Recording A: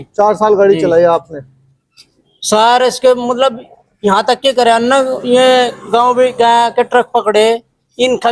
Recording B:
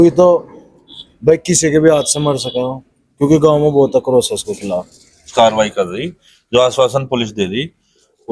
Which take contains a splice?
B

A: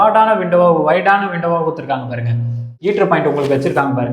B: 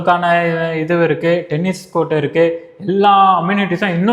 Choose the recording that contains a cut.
A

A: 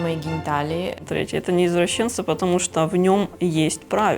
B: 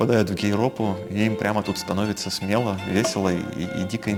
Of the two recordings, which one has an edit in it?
A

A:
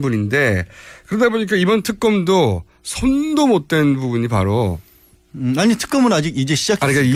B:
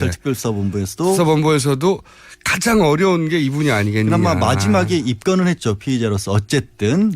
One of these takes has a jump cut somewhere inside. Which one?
B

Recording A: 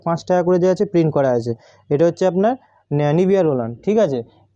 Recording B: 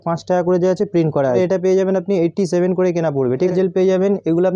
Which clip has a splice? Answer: B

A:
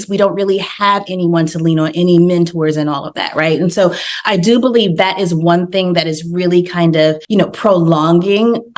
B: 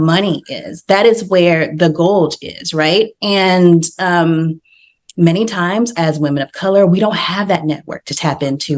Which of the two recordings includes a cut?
A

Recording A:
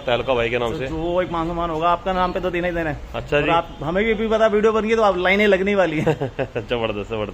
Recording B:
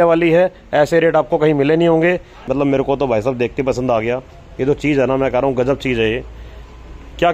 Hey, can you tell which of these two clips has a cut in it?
B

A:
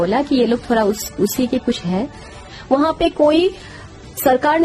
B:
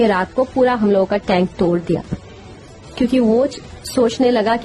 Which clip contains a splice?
A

